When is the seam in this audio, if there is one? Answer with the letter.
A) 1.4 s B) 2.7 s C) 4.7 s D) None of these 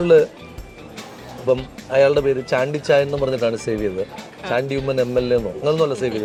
D